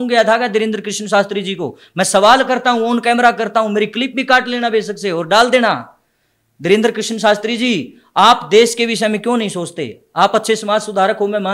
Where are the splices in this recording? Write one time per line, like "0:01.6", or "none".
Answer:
none